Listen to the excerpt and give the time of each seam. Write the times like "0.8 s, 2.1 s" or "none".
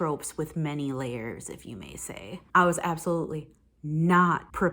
2.3 s